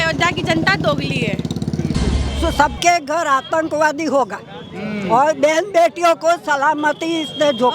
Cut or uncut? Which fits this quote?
cut